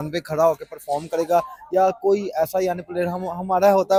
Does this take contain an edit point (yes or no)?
no